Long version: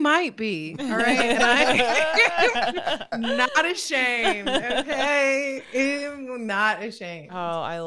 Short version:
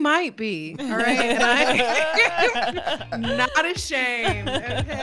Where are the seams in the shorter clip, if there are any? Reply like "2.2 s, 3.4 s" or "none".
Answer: none